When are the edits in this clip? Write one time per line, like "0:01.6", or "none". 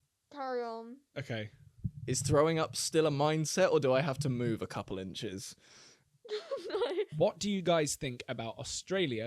0:07.1